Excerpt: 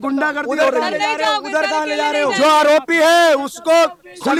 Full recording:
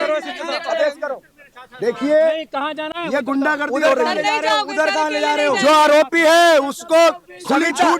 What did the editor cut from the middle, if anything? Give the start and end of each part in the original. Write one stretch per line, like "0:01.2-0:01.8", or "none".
none